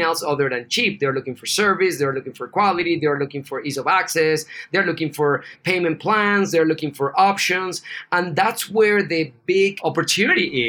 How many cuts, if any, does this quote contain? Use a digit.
2